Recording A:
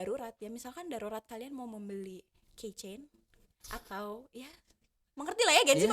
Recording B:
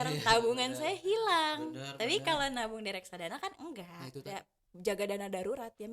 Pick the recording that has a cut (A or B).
B